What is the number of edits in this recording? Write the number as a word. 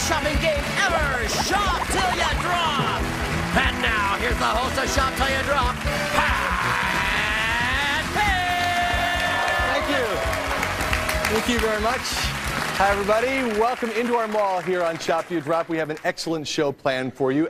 one